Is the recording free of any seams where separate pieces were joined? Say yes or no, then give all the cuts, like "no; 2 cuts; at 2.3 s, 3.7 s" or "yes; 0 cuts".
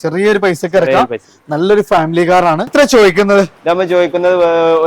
no; 1 cut; at 2.7 s